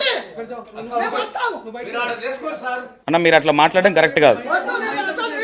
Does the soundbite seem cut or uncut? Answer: uncut